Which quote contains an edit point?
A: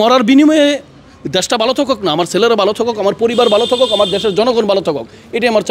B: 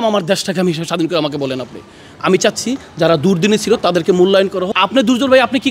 B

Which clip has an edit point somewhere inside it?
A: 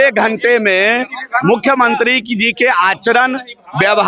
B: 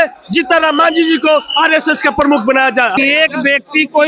B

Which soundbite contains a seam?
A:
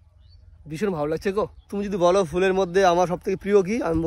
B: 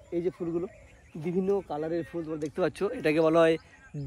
A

